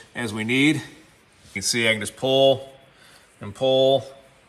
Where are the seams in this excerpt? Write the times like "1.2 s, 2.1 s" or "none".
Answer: 1.5 s